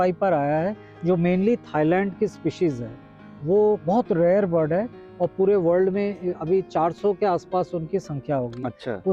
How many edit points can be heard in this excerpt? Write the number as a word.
zero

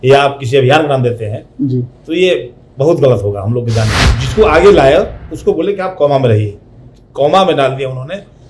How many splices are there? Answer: one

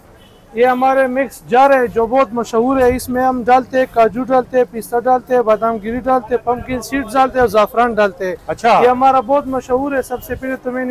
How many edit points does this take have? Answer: zero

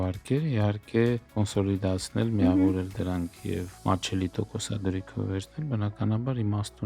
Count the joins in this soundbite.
two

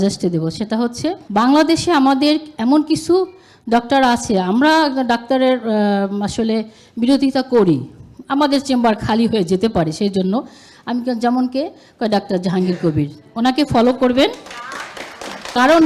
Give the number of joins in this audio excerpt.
one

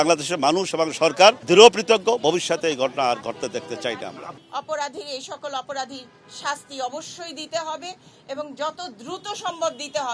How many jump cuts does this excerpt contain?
two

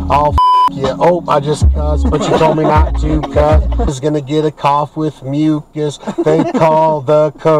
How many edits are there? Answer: one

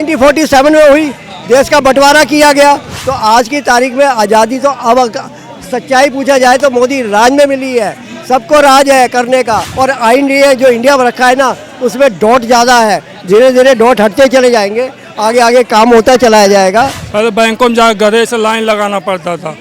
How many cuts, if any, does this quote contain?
three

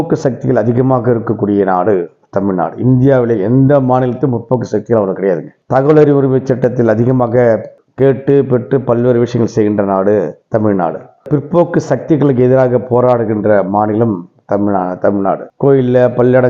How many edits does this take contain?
zero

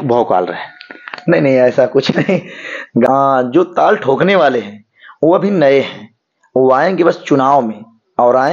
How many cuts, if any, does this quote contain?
one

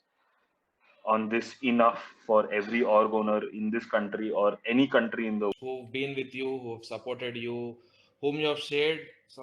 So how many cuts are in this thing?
one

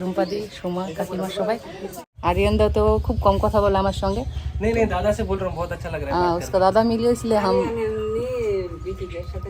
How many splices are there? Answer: one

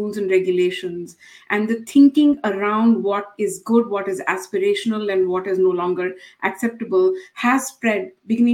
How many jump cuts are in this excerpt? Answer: zero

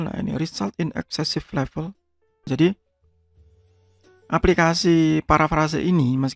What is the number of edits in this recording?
one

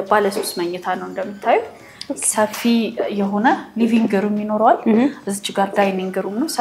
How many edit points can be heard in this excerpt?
zero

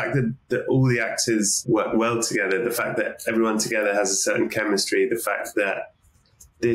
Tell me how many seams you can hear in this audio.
one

